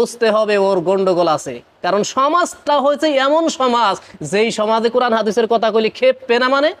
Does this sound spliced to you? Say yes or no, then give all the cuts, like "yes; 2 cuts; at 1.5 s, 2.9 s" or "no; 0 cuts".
no; 0 cuts